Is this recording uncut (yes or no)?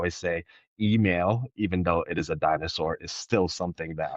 yes